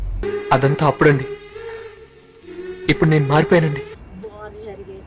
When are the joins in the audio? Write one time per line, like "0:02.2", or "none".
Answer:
0:04.0